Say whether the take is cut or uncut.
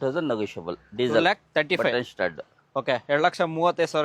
uncut